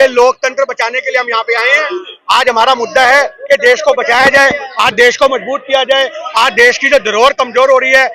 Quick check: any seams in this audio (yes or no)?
no